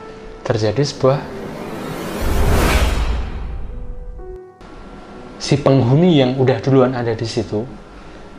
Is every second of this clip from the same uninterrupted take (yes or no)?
no